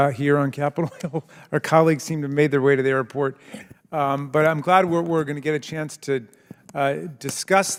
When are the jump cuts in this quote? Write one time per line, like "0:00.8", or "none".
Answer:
none